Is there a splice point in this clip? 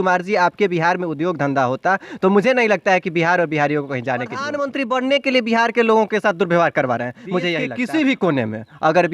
yes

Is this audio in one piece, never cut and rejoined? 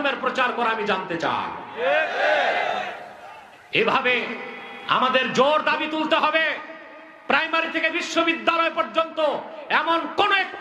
yes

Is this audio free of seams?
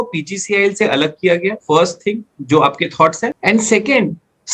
no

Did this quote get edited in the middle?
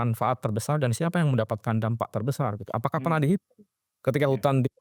no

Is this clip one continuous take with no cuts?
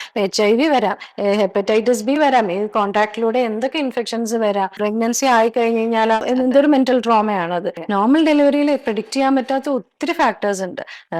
no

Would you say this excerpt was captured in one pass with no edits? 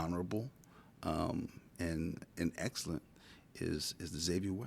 yes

